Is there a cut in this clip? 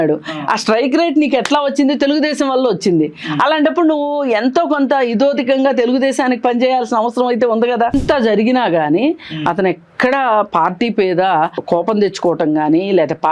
yes; 2 cuts; at 7.9 s, 11.6 s

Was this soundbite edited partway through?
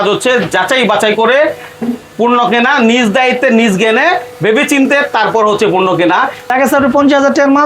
yes; 1 cut; at 6.5 s

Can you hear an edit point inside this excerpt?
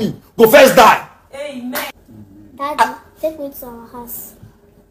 yes; 1 cut; at 1.9 s

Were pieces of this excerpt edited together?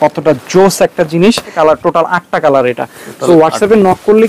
yes; 1 cut; at 1.5 s

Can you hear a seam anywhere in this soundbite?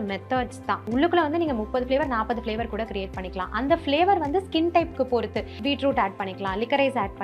yes; 2 cuts; at 0.8 s, 5.6 s

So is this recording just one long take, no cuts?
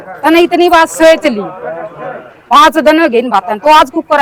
yes; 0 cuts

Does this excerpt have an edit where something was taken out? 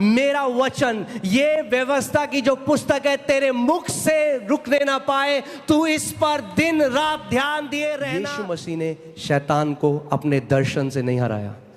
yes; 1 cut; at 8.2 s

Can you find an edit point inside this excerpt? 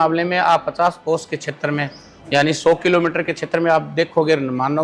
yes; 1 cut; at 1.0 s

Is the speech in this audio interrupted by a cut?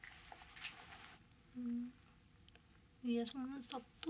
no; 0 cuts

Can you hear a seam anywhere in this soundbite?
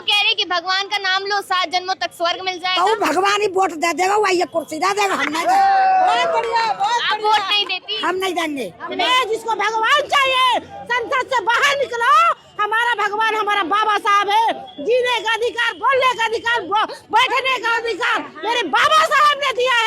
yes; 1 cut; at 9.0 s

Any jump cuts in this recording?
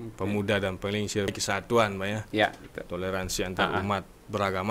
yes; 1 cut; at 1.3 s

